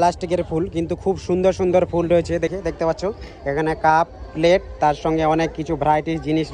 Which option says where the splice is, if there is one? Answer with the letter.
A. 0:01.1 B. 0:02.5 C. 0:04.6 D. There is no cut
B